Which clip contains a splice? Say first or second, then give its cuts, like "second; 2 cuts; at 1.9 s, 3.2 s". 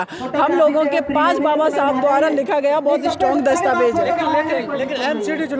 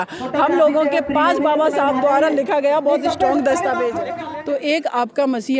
second; 1 cut; at 4.2 s